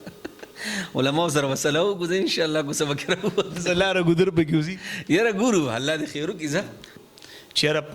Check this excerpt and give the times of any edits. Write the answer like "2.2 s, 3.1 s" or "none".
7.0 s

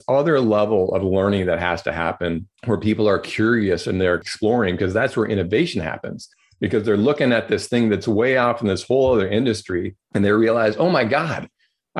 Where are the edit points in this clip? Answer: 2.5 s, 10.0 s

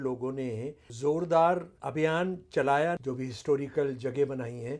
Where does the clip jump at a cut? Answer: 0.9 s, 1.8 s, 3.0 s

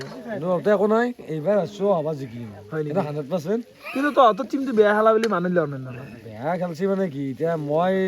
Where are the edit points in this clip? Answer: none

